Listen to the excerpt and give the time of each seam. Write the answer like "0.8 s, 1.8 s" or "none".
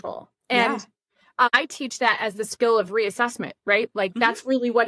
1.5 s